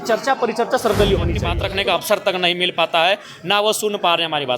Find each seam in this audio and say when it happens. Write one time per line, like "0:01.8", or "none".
0:01.5